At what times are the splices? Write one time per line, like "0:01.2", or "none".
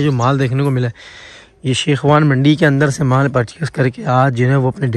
none